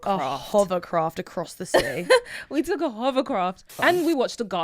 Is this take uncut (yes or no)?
no